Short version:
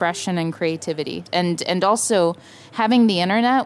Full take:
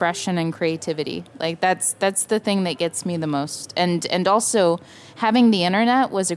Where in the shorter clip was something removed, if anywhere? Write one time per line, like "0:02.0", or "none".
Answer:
0:01.2